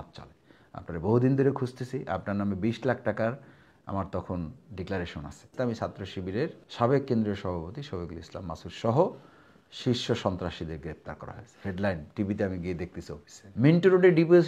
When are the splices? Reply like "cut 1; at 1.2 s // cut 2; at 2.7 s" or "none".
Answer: cut 1; at 5.5 s // cut 2; at 6.6 s // cut 3; at 13.4 s